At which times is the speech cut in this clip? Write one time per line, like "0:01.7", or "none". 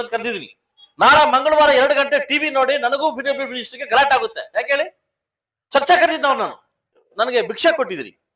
0:07.0